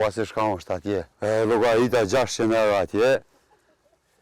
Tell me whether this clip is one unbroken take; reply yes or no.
no